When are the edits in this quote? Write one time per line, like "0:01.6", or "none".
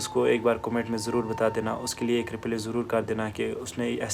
none